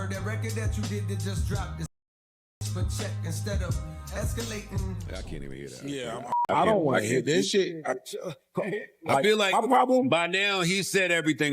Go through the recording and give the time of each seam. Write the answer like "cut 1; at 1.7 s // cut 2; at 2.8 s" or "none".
cut 1; at 6.3 s